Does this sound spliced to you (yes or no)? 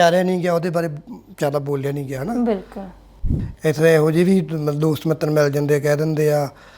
yes